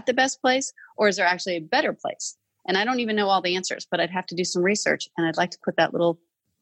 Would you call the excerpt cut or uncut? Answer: uncut